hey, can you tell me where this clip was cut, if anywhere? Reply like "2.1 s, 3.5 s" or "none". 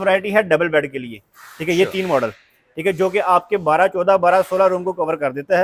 none